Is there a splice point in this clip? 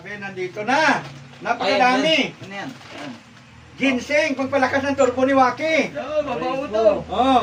no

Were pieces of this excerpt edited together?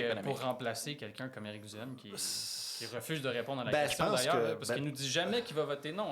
no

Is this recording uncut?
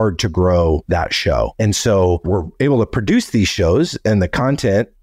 no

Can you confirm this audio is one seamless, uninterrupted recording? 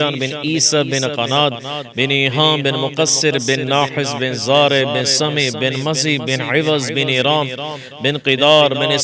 yes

